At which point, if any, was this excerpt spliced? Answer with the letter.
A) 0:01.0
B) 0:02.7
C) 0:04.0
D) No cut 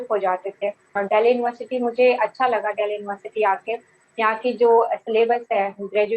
A